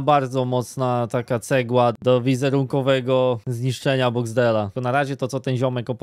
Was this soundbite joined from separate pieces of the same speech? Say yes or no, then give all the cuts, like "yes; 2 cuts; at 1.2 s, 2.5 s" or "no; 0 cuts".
yes; 2 cuts; at 1.9 s, 4.7 s